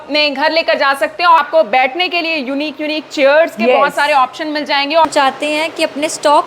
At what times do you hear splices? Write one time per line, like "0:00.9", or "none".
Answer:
0:01.4
0:05.0